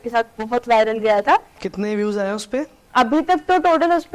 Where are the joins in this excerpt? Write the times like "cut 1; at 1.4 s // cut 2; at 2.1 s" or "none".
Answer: cut 1; at 1.7 s // cut 2; at 2.8 s

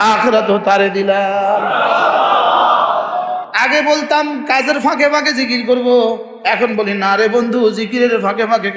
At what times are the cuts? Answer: cut 1; at 3.5 s

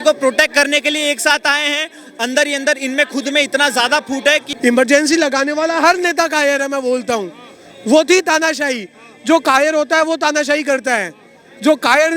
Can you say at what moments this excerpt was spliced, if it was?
cut 1; at 4.5 s

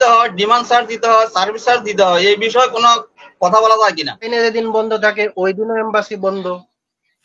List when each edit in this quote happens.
cut 1; at 4.3 s

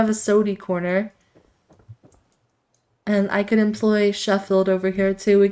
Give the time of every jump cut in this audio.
none

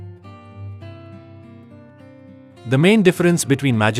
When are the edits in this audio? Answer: cut 1; at 2.9 s

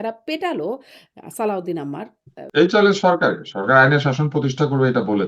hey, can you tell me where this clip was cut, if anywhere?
cut 1; at 2.4 s

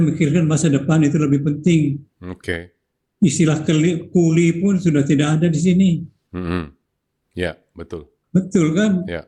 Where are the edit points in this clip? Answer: cut 1; at 8.1 s

